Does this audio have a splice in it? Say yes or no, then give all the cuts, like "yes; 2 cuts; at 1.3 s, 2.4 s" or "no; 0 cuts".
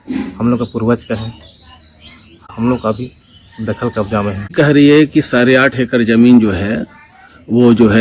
yes; 2 cuts; at 2.5 s, 4.5 s